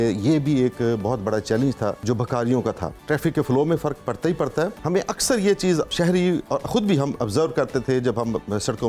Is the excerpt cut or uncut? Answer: cut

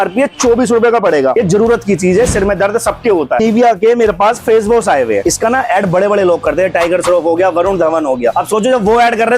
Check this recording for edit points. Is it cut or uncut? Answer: cut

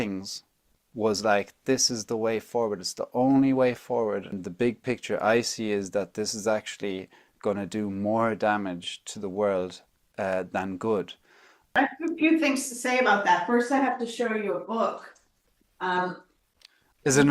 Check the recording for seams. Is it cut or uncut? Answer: cut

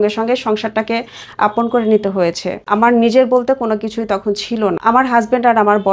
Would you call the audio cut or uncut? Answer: cut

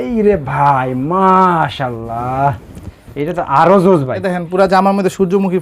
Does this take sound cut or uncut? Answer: cut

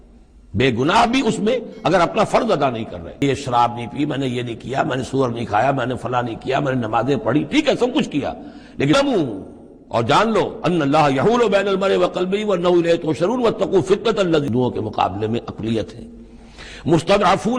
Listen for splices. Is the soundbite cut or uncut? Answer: cut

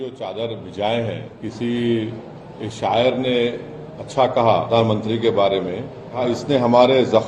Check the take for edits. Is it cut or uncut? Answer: cut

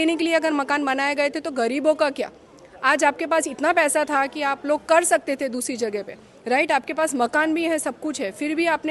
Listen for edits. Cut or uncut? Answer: uncut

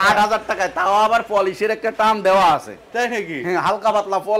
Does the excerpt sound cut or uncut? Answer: uncut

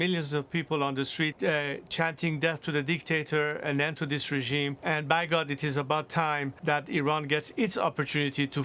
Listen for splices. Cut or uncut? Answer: cut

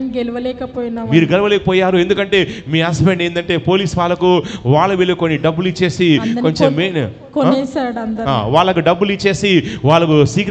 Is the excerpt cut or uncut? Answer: uncut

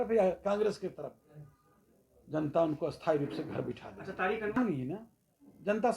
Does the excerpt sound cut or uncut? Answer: cut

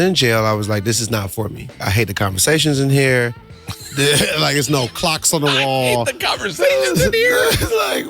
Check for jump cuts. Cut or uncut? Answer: cut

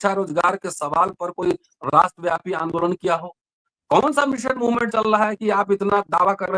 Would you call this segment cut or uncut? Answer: uncut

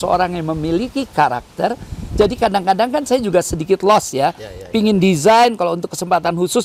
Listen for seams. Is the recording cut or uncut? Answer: uncut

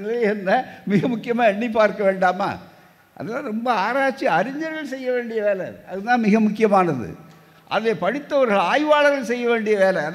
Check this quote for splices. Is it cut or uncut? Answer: uncut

